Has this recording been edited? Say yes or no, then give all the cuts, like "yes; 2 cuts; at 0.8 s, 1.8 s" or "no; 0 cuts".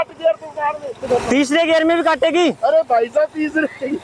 yes; 1 cut; at 1.0 s